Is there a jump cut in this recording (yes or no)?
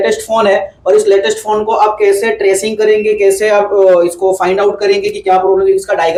no